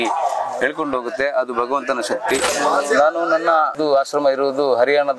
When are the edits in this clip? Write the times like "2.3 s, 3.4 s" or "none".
2.5 s, 3.7 s